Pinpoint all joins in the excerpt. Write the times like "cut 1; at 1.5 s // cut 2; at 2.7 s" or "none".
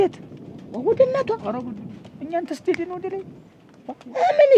none